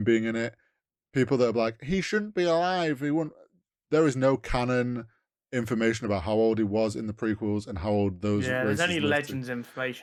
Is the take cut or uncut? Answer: uncut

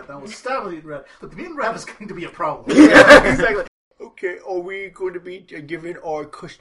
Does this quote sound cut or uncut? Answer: cut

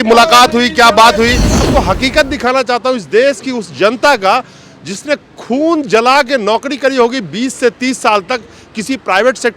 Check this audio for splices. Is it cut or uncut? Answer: cut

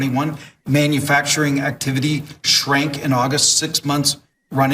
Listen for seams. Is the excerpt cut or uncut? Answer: uncut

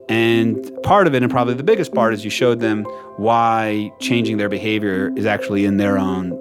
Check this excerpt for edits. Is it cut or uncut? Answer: uncut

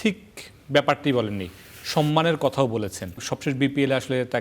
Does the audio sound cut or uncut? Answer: cut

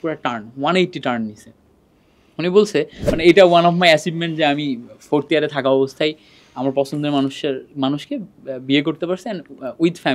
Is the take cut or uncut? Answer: cut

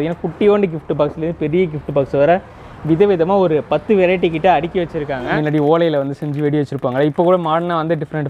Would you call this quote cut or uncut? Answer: cut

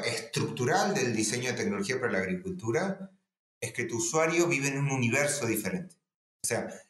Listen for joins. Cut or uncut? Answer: uncut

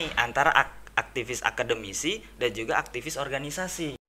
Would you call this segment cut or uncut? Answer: uncut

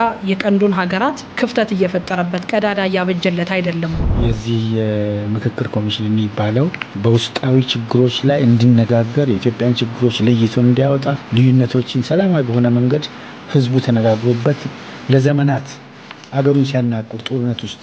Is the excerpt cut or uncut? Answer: cut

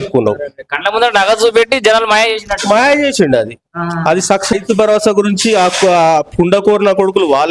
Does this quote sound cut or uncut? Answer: cut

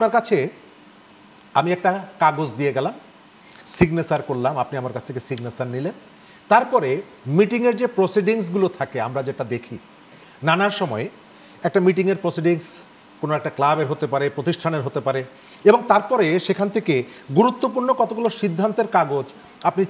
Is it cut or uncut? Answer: uncut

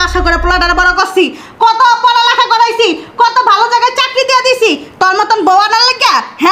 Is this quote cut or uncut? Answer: uncut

